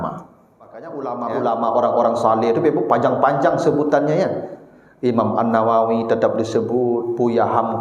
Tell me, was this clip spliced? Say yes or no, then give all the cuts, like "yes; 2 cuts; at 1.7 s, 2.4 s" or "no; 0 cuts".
yes; 1 cut; at 0.9 s